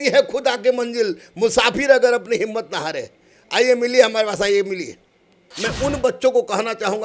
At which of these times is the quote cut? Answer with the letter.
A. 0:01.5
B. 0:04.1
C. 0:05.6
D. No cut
C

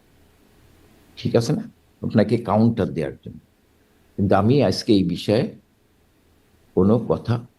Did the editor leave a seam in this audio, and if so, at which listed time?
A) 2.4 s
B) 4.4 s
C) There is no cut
C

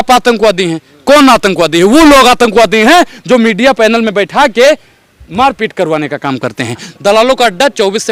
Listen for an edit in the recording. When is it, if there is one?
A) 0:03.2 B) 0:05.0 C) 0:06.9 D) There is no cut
C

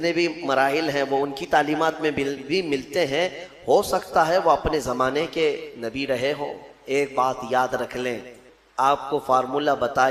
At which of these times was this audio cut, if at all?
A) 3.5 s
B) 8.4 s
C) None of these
B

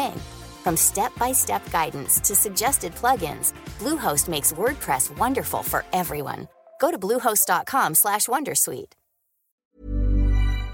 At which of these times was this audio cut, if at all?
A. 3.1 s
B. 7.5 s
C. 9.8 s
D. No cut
C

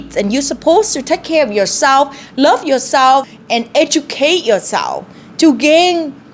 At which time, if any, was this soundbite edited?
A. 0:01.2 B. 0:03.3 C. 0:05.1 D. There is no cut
B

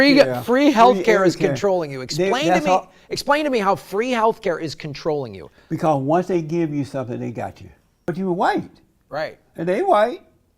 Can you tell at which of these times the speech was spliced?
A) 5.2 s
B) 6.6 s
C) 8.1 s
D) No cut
C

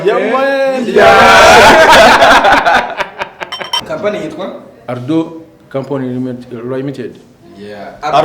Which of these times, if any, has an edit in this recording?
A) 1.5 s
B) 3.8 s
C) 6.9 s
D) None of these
B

